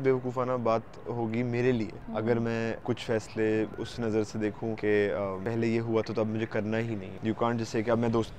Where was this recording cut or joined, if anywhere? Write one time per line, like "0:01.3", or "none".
0:02.0
0:02.8
0:03.8
0:04.8
0:05.4
0:07.1